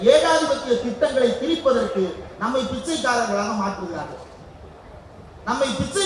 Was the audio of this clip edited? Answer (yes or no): no